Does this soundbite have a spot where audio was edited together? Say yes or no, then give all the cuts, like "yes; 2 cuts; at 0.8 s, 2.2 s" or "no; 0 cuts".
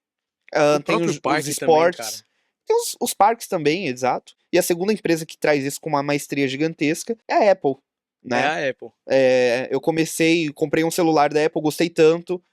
yes; 2 cuts; at 4.3 s, 7.1 s